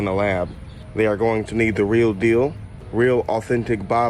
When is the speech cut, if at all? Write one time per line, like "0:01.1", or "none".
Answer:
none